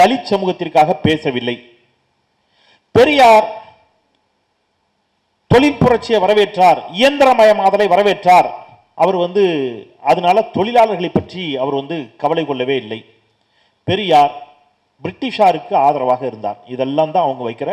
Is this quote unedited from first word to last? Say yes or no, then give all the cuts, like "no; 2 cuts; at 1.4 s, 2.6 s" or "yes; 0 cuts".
yes; 0 cuts